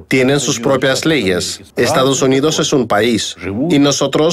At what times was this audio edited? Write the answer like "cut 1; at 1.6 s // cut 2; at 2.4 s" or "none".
cut 1; at 1.7 s